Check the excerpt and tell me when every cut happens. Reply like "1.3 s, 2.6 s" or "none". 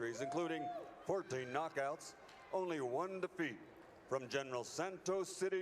4.5 s